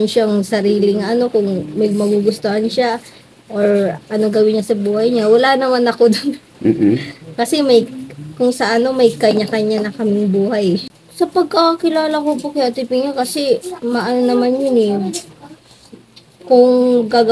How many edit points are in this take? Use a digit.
1